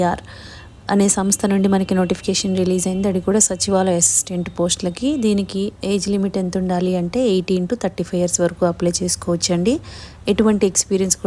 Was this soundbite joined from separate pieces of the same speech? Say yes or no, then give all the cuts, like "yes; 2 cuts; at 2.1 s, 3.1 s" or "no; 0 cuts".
no; 0 cuts